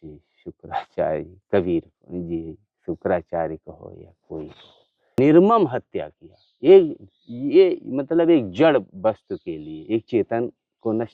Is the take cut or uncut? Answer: cut